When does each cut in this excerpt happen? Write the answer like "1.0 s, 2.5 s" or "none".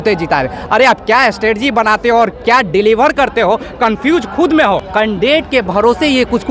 4.9 s